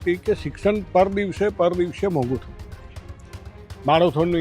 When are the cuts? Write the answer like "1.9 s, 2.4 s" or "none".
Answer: none

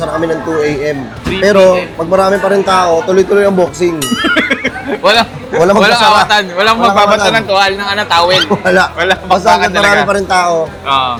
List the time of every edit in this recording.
none

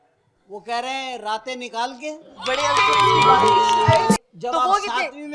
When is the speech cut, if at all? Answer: 4.2 s

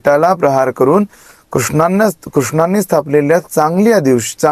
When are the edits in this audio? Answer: none

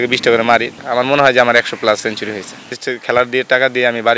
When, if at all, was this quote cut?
0.8 s, 2.7 s

